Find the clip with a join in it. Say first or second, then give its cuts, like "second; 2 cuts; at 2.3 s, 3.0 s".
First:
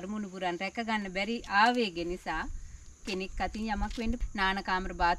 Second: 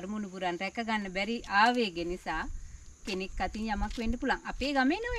first; 1 cut; at 4.2 s